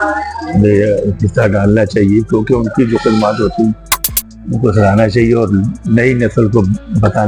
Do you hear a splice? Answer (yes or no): no